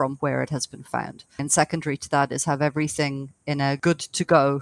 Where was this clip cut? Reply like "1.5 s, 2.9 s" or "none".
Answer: 1.4 s, 3.8 s